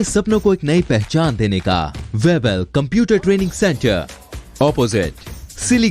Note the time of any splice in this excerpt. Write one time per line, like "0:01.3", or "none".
0:02.0